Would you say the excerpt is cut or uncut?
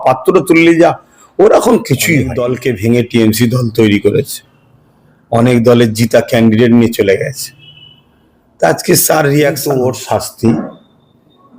cut